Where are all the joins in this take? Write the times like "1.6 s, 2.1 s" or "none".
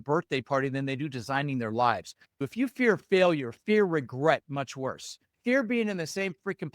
2.5 s